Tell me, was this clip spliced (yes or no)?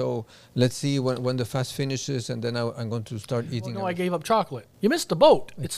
yes